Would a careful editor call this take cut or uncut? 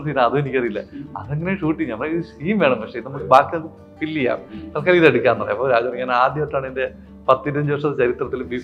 uncut